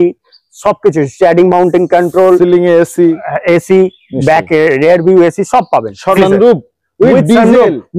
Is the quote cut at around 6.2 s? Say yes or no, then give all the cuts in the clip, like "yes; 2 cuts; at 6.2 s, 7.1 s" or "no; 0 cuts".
yes; 1 cut; at 6.2 s